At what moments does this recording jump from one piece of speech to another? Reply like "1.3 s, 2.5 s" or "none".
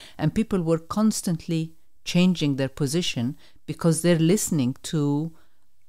none